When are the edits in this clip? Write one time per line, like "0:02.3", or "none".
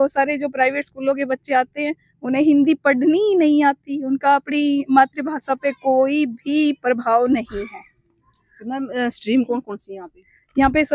none